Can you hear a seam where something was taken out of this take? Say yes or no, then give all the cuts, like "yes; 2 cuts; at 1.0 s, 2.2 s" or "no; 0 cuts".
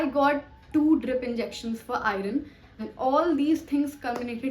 yes; 1 cut; at 2.8 s